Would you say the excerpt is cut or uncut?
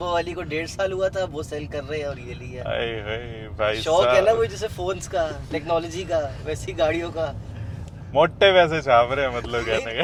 uncut